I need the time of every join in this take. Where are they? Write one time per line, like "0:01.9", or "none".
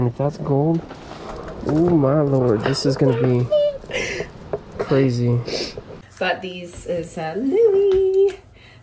0:06.0